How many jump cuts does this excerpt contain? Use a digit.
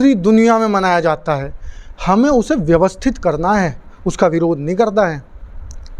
0